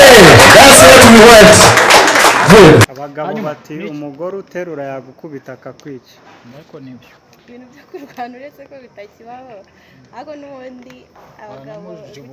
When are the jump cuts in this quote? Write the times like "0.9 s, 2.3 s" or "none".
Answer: 2.9 s

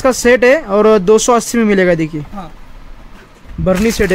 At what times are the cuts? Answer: none

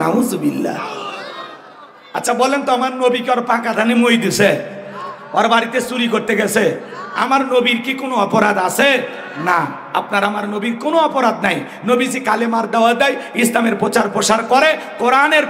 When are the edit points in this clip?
none

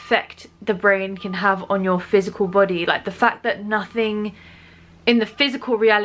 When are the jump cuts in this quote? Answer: none

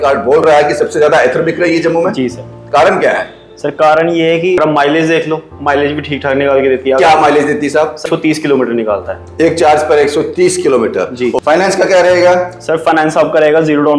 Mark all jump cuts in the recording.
4.6 s, 8.0 s, 11.4 s

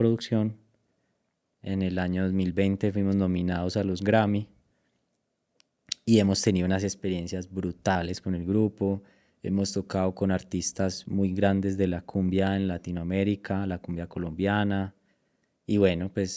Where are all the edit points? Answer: none

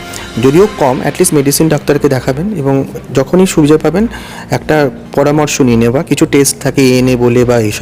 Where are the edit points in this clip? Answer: none

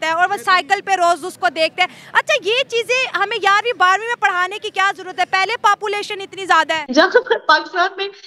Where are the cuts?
6.8 s

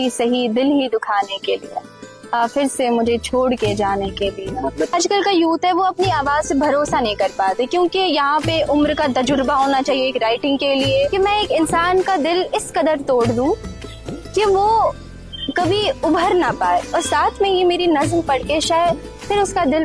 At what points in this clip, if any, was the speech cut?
4.9 s, 11.1 s

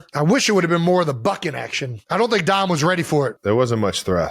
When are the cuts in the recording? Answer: none

